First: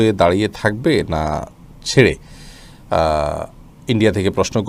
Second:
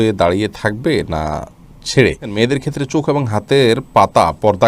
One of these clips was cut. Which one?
second; 1 cut; at 2.3 s

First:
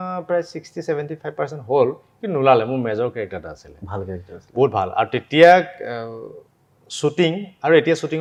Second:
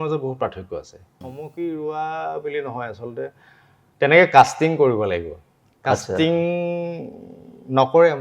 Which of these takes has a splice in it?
second; 1 cut; at 1.2 s

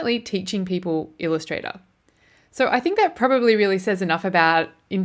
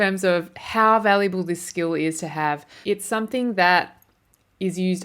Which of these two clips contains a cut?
second; 1 cut; at 2.8 s

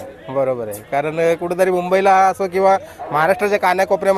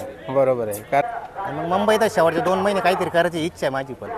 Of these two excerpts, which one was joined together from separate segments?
second; 1 cut; at 1.0 s

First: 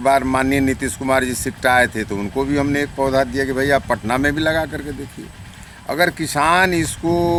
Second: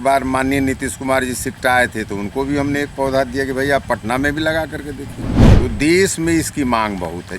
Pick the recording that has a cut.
second; 1 cut; at 5.4 s

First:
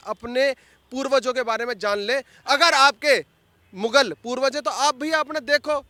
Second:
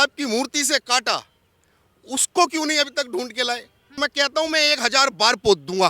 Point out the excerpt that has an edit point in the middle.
second; 1 cut; at 4.0 s

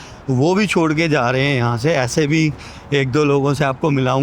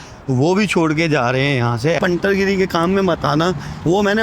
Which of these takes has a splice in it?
second; 1 cut; at 2.0 s

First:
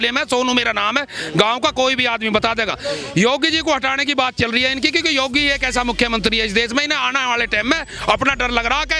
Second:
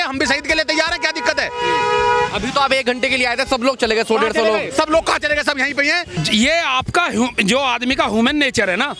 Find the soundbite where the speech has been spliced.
second; 1 cut; at 6.1 s

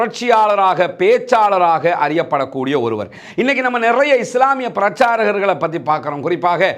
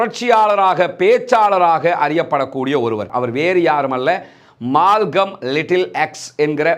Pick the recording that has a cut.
second; 1 cut; at 3.1 s

